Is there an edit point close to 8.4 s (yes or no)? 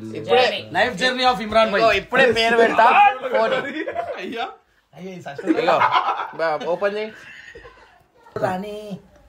yes